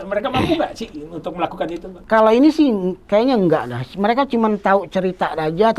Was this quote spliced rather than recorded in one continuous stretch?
yes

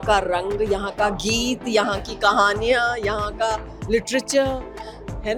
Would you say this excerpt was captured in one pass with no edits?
yes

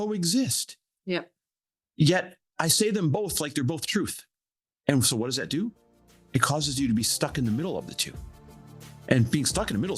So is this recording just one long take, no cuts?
yes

